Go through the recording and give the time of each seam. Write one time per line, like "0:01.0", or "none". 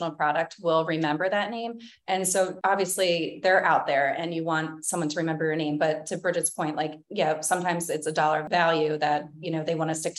0:02.6
0:08.4